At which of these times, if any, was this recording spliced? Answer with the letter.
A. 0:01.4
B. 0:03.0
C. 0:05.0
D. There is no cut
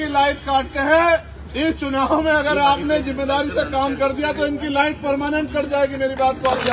A